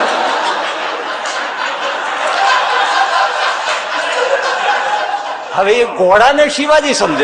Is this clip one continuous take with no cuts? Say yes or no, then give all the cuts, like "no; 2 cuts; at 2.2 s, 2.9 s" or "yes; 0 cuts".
yes; 0 cuts